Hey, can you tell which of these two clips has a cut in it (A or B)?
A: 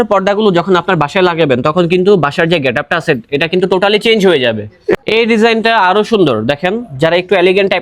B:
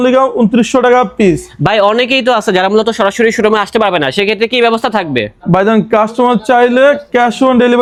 A